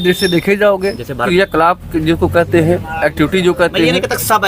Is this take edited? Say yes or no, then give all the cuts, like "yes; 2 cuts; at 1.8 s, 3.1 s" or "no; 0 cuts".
yes; 1 cut; at 1.2 s